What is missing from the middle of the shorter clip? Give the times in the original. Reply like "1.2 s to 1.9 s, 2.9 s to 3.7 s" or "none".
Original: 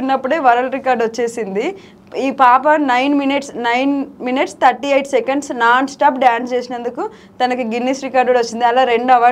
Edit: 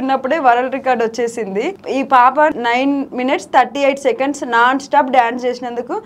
1.8 s to 2.1 s, 3.0 s to 3.8 s

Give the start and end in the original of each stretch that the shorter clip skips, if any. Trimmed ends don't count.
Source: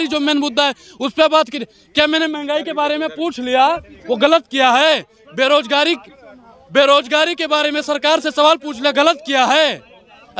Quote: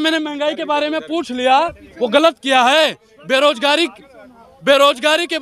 none

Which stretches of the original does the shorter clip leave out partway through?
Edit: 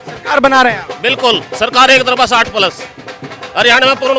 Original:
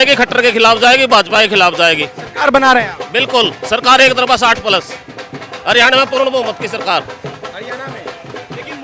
none

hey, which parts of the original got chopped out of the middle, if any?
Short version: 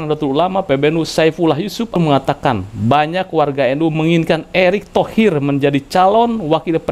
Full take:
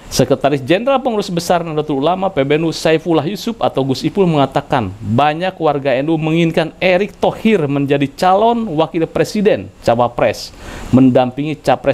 3.6 s to 4.2 s

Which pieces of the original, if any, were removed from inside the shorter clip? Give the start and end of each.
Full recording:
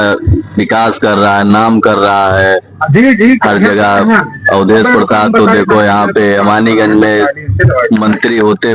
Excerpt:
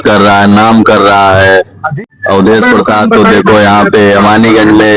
2.9 s to 4.2 s

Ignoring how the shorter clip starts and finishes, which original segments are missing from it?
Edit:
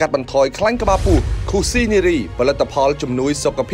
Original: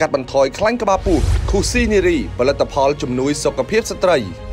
none

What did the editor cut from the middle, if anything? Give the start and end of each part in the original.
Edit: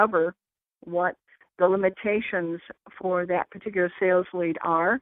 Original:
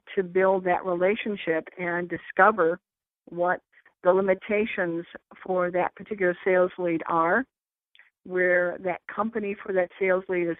none

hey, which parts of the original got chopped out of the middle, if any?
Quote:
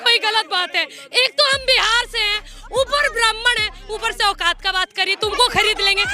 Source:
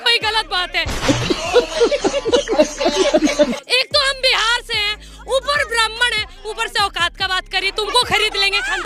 1.0 s to 3.6 s

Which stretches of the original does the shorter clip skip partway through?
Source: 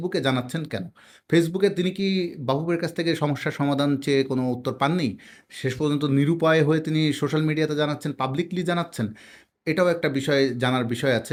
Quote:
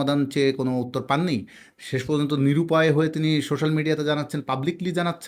none

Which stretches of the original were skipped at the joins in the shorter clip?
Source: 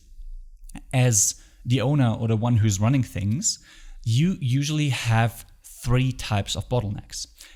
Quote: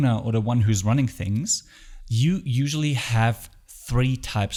none

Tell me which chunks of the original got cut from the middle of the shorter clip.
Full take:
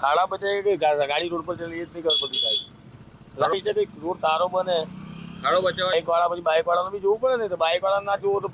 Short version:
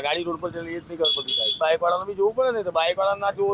2.6 s to 6.4 s

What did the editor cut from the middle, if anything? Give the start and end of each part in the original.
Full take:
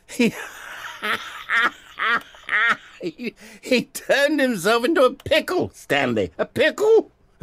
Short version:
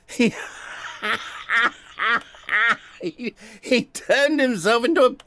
none

